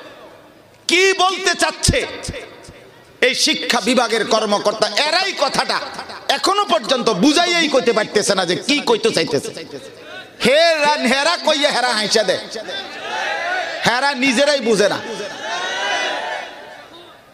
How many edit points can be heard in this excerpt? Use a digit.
0